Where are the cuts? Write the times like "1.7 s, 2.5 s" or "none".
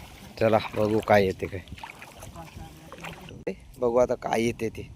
3.6 s